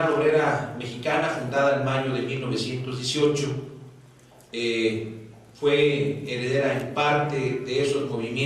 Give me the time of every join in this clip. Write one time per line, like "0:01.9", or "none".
0:03.6